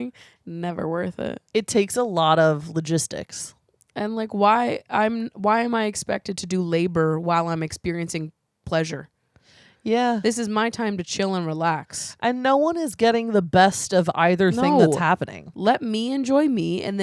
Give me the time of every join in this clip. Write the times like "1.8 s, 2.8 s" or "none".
1.4 s